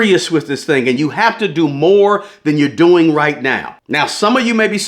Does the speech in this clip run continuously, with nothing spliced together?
yes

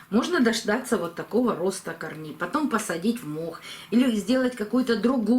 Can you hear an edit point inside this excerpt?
no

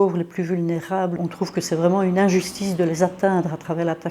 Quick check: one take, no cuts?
no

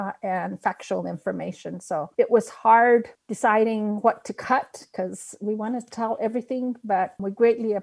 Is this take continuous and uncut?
yes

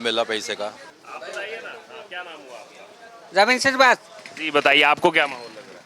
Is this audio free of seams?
yes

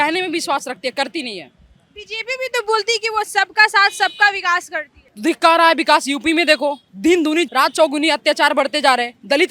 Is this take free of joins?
yes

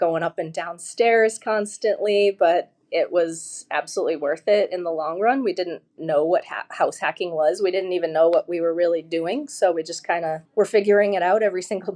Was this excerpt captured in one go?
no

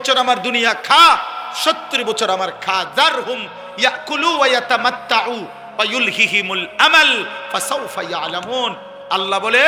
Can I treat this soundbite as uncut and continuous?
yes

